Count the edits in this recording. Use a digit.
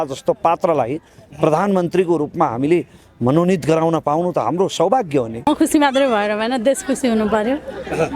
1